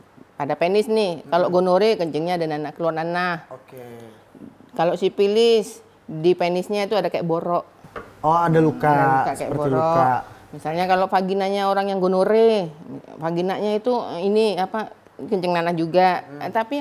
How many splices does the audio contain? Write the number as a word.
zero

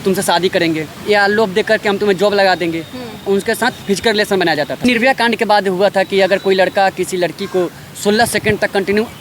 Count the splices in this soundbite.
three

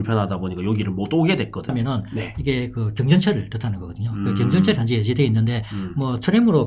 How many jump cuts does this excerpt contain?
one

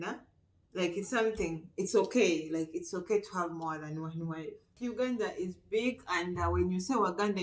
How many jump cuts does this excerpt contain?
one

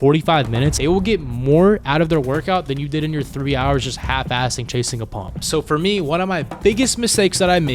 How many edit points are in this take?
two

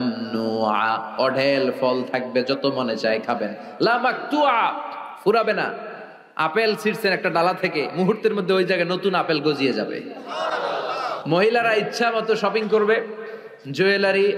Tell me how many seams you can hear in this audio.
one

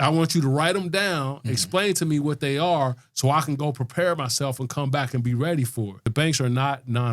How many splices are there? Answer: one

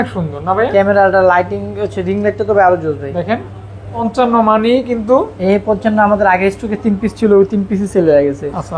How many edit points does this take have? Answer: one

